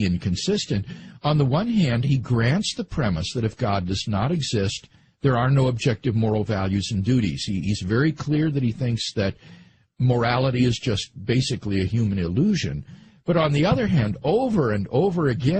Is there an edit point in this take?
yes; 1 cut; at 9.7 s

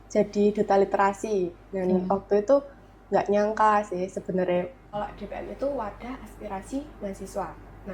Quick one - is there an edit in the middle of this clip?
yes; 1 cut; at 4.8 s

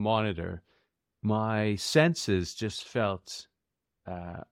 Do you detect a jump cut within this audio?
no; 0 cuts

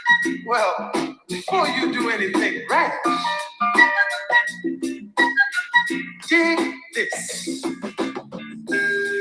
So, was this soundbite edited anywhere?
no; 0 cuts

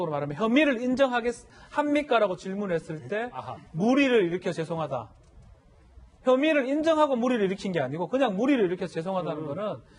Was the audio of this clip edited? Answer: no; 0 cuts

